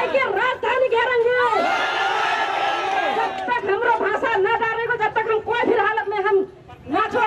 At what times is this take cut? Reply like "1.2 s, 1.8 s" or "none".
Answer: none